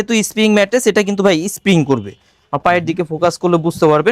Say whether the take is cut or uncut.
uncut